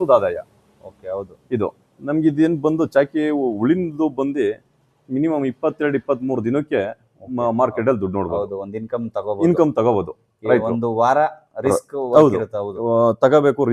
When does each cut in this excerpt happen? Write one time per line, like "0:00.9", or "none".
none

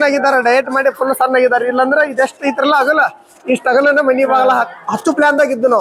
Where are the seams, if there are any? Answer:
none

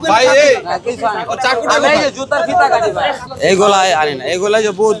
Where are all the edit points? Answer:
0:03.3

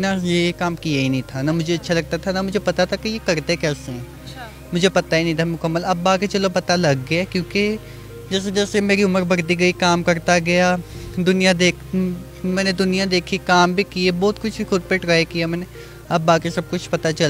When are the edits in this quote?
none

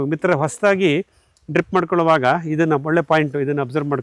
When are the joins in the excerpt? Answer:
none

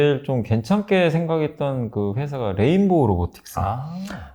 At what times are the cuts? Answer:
none

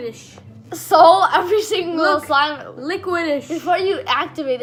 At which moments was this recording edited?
none

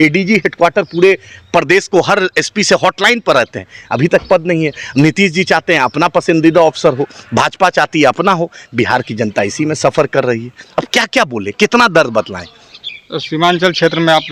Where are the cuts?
none

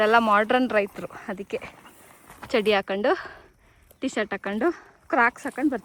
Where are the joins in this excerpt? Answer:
none

